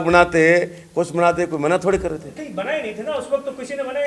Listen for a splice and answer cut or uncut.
uncut